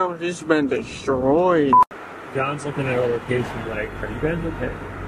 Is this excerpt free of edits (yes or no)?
no